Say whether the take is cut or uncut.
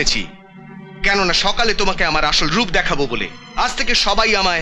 cut